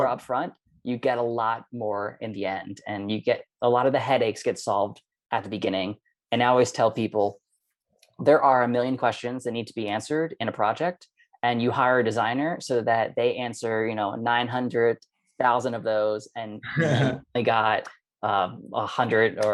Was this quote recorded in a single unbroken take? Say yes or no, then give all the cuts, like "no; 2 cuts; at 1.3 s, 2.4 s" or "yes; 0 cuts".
yes; 0 cuts